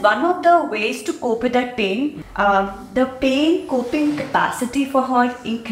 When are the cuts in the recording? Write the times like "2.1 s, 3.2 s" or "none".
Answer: 2.2 s